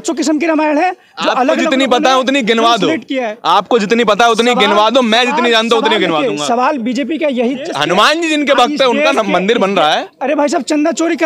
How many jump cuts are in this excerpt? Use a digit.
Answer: 1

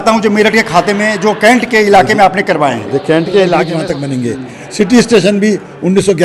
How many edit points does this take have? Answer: 1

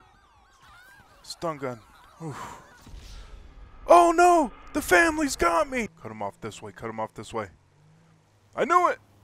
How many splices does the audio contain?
1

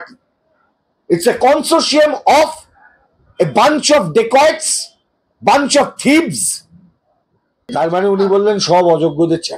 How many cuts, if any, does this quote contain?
1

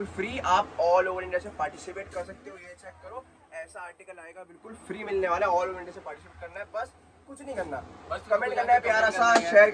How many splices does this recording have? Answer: 0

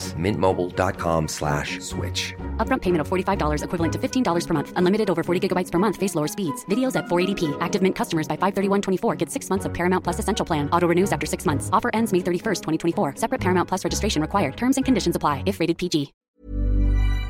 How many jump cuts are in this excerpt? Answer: 1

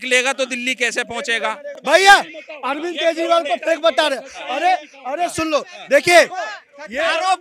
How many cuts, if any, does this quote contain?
1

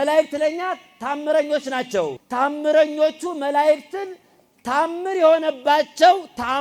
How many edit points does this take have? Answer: 1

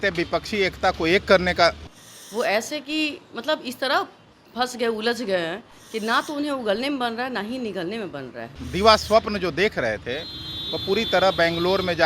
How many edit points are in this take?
2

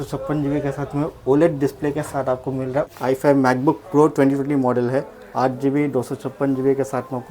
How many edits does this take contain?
1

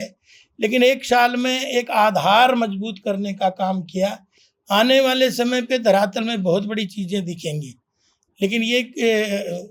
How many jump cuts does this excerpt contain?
0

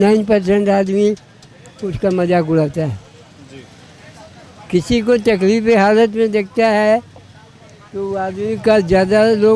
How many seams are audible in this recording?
0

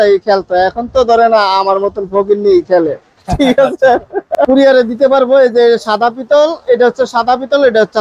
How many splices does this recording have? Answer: 1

